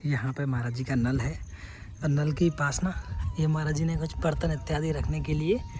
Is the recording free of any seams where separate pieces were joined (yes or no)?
yes